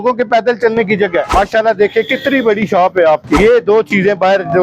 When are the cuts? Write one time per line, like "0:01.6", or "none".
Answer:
0:01.3
0:03.4